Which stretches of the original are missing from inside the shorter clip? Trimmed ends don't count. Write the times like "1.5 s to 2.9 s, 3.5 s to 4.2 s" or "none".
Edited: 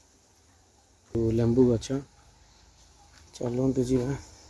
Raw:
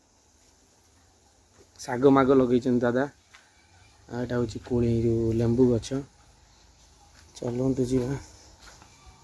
1.6 s to 5.2 s